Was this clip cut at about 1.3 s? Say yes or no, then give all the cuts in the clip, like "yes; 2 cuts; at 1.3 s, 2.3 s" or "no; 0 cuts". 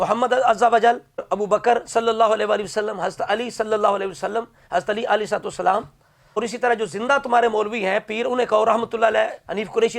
yes; 1 cut; at 1.3 s